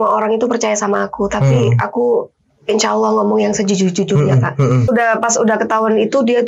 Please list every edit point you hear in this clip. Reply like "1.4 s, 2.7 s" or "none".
4.9 s